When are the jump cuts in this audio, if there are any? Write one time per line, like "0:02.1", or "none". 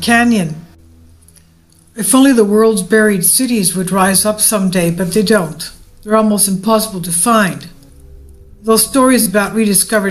0:06.8